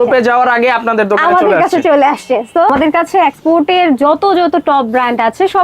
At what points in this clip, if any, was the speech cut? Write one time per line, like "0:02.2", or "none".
0:02.7